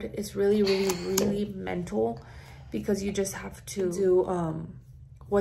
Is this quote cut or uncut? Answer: cut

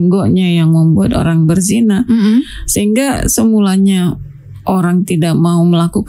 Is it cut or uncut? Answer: uncut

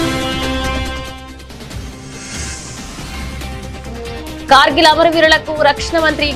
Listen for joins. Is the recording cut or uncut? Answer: cut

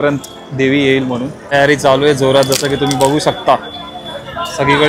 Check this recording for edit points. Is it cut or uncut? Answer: cut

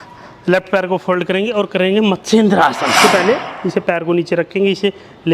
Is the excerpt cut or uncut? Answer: cut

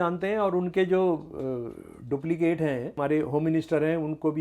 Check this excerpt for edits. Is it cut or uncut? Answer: cut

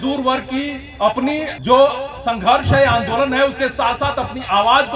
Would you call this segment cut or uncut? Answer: cut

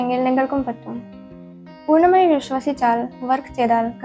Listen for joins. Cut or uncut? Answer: uncut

